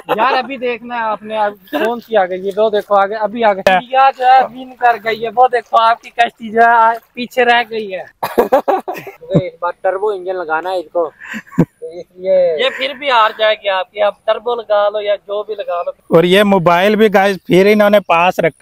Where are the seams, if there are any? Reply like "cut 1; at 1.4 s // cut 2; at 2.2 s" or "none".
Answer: cut 1; at 3.7 s // cut 2; at 9.2 s // cut 3; at 16.0 s